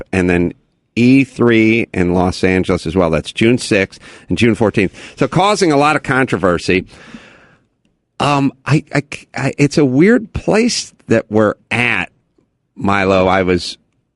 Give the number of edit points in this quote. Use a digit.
1